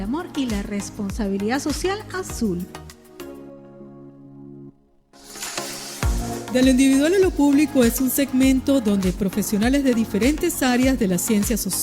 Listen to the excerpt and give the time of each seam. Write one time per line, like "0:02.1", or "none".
0:02.9
0:05.3